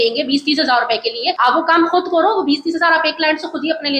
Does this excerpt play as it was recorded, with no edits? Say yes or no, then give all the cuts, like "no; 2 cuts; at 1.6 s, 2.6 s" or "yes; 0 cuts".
yes; 0 cuts